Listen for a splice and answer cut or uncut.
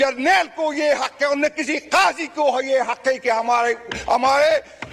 uncut